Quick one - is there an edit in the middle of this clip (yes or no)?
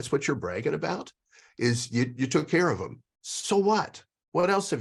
no